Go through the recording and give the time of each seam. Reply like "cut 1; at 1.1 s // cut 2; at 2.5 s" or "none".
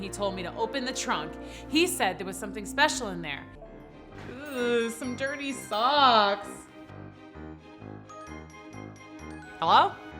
cut 1; at 3.7 s